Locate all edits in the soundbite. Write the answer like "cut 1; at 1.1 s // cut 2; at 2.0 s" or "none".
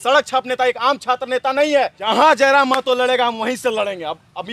cut 1; at 2.1 s